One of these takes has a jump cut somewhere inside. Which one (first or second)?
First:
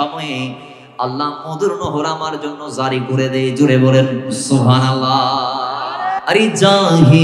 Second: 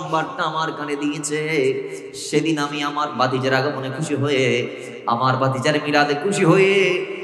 first